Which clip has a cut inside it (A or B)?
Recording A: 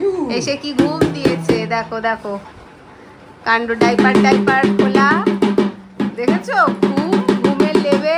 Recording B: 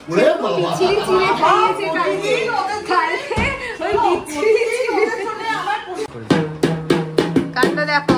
B